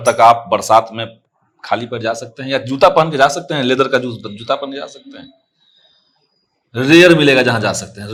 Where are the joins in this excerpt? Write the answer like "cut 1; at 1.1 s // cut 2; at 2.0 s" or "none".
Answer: none